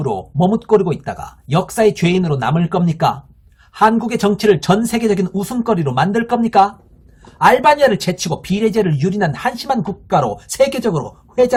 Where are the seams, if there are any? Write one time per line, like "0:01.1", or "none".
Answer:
none